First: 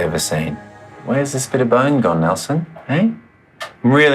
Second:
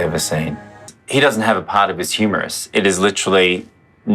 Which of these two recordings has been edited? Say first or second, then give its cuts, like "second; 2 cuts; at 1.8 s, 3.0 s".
second; 1 cut; at 0.9 s